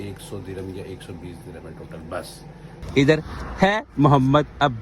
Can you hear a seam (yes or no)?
yes